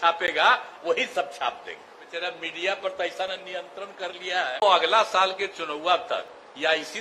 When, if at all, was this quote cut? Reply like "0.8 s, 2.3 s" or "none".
2.1 s, 4.6 s